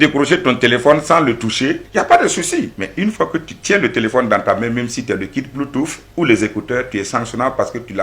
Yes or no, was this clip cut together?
yes